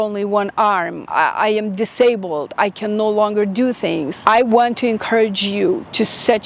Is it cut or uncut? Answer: cut